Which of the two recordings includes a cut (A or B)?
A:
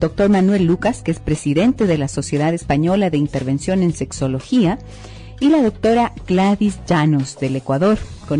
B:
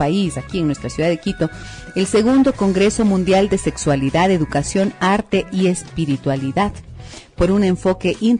B